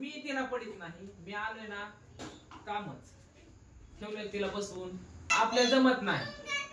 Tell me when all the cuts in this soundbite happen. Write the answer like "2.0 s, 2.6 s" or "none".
5.3 s